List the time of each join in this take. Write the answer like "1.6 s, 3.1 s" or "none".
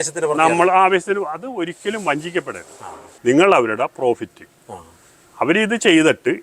3.0 s